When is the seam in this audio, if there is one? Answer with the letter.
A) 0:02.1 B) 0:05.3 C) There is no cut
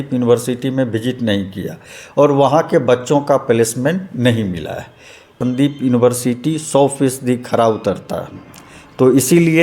B